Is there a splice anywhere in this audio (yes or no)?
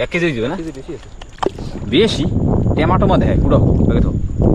no